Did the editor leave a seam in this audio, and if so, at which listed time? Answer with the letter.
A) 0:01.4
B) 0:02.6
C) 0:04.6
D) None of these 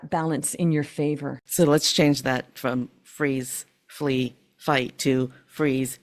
A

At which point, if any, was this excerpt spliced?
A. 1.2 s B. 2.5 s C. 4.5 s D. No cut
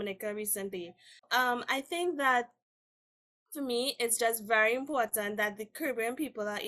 A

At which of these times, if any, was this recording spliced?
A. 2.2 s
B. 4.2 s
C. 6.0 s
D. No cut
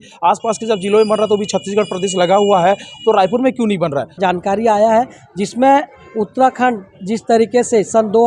B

